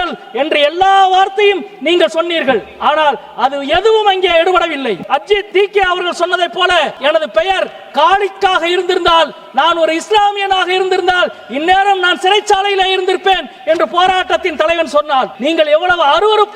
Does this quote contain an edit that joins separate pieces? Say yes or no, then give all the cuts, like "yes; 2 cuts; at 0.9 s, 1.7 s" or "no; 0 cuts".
yes; 3 cuts; at 5.1 s, 6.9 s, 15.3 s